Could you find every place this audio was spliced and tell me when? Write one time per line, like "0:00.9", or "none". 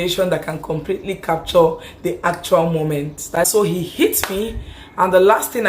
0:03.2